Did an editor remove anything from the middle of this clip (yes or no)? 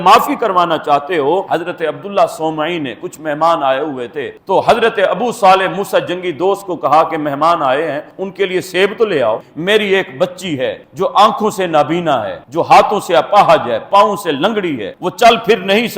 yes